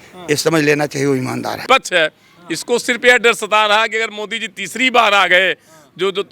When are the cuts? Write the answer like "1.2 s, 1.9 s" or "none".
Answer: 1.6 s